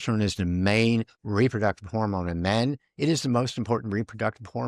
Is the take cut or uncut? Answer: cut